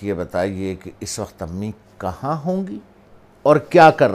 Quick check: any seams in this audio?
no; 0 cuts

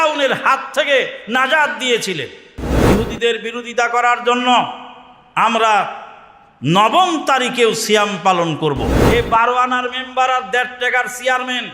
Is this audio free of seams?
no; 2 cuts; at 2.7 s, 9.0 s

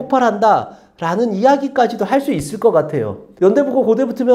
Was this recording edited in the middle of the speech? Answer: yes; 1 cut; at 3.3 s

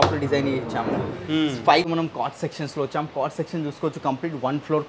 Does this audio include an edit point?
yes; 1 cut; at 1.9 s

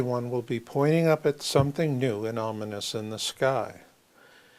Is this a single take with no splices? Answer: yes; 0 cuts

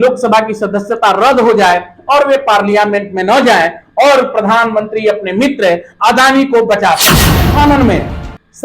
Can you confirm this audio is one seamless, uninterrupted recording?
no; 1 cut; at 7.5 s

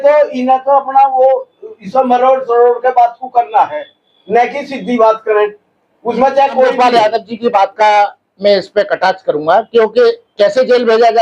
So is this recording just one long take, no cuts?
no; 1 cut; at 6.7 s

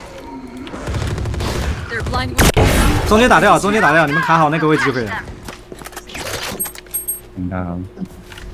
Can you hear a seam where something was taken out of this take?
yes; 1 cut; at 5.5 s

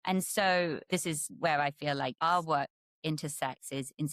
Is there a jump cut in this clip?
yes; 2 cuts; at 0.9 s, 2.2 s

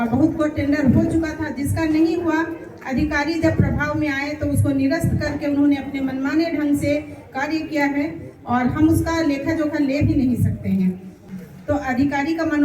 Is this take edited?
yes; 1 cut; at 11.3 s

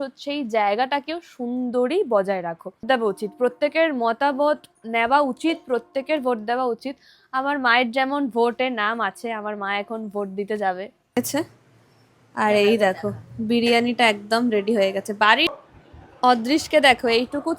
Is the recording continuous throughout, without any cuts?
no; 3 cuts; at 2.8 s, 11.2 s, 15.5 s

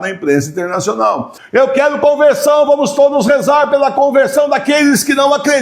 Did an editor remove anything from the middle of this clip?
yes; 1 cut; at 1.3 s

